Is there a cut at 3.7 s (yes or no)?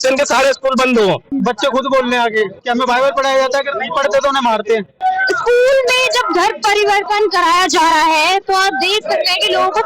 no